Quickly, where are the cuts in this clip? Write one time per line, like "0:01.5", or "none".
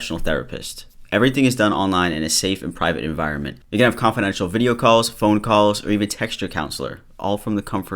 0:03.5